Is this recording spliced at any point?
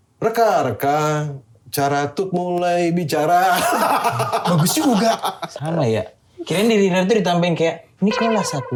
no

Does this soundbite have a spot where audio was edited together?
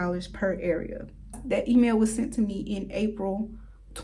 yes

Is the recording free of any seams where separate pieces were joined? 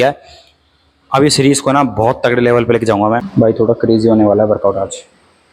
no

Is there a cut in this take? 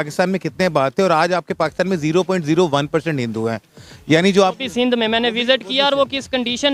no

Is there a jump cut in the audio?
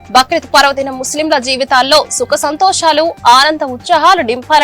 no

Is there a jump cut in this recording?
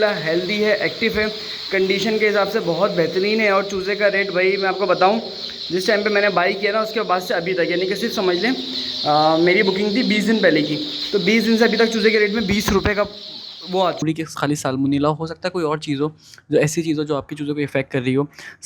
yes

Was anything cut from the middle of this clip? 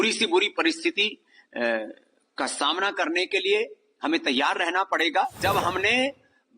yes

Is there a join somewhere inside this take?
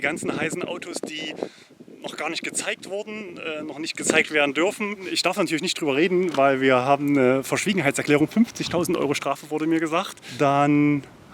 yes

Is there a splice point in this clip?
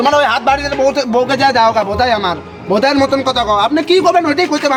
no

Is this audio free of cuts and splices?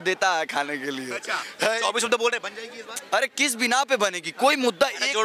yes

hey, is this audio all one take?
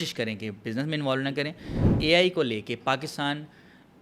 no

